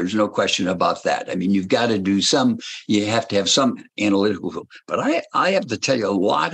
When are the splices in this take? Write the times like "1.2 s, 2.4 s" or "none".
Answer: none